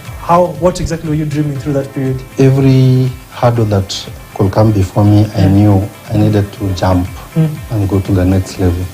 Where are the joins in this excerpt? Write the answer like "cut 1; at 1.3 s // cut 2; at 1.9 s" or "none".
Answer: cut 1; at 2.2 s